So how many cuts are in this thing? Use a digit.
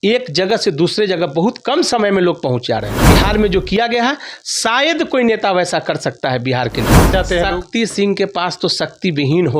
2